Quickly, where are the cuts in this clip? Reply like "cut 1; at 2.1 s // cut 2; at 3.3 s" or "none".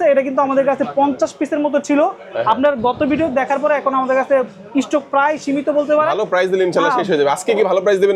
none